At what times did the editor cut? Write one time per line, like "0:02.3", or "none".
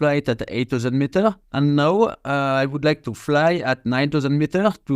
0:01.4